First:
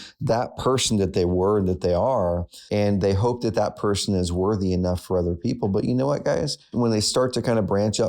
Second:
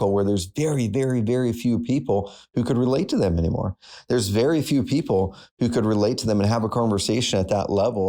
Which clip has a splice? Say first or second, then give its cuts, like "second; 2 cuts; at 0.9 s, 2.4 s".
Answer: first; 2 cuts; at 2.5 s, 6.6 s